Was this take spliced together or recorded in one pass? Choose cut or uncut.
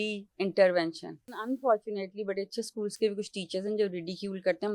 cut